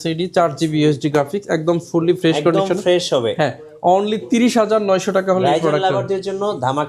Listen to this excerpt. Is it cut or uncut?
uncut